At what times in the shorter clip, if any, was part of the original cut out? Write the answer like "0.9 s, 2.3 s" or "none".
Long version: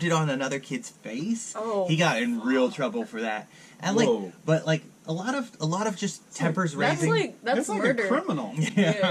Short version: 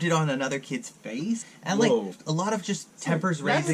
1.5 s, 2.2 s